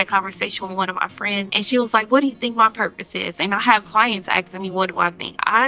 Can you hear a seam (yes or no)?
yes